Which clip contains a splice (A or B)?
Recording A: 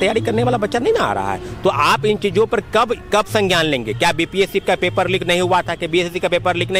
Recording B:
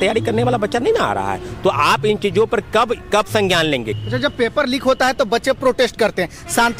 B